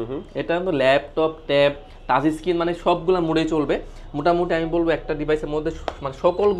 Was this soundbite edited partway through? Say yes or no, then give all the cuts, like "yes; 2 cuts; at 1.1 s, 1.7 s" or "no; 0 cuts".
no; 0 cuts